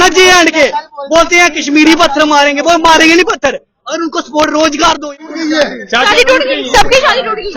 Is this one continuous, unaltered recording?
no; 1 cut; at 5.1 s

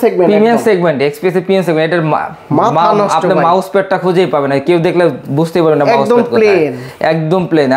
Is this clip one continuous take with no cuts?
yes; 0 cuts

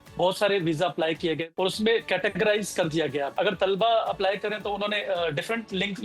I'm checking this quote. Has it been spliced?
yes; 2 cuts; at 1.5 s, 3.3 s

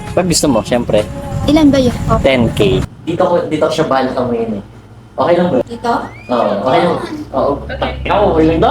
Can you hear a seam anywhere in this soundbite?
yes; 2 cuts; at 2.9 s, 5.6 s

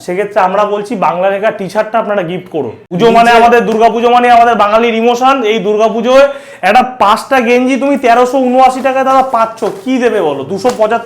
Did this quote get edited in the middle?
yes; 1 cut; at 2.8 s

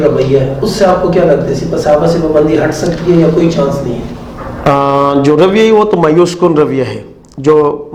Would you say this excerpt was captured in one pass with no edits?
yes; 0 cuts

